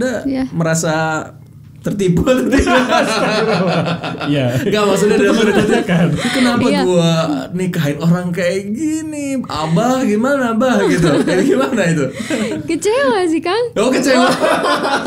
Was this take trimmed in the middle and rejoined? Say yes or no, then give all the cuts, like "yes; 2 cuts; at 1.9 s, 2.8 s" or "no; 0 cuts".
no; 0 cuts